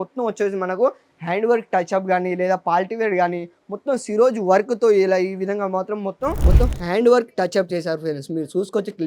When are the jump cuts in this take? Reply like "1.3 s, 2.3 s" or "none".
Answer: 6.4 s